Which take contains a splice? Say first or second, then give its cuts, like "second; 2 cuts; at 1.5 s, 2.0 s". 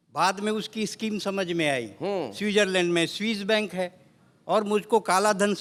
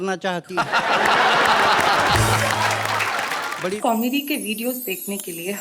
second; 1 cut; at 3.8 s